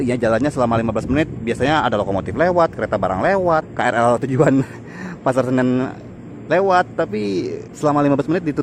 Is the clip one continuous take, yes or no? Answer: no